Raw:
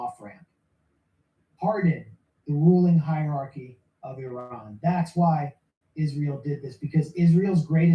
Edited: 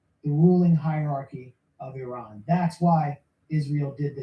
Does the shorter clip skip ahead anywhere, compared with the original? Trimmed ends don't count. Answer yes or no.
yes